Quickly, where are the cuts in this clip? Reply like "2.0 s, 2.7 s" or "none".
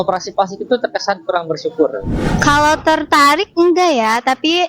2.3 s